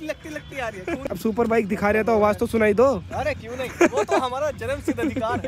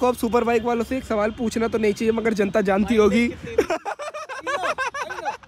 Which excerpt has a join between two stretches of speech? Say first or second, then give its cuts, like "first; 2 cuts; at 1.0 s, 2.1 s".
first; 1 cut; at 1.1 s